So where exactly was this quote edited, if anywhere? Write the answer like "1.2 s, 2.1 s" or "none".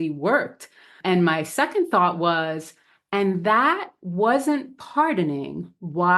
0.9 s